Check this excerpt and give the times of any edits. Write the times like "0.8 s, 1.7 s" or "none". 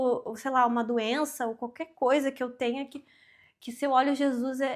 none